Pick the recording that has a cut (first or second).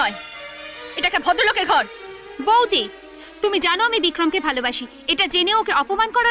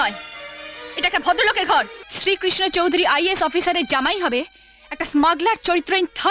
second